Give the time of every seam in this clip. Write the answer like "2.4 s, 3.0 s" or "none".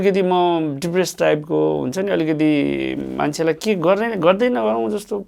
none